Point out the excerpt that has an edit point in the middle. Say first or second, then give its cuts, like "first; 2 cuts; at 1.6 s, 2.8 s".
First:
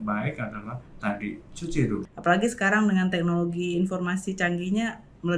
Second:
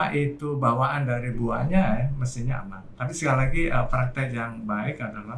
first; 1 cut; at 2.0 s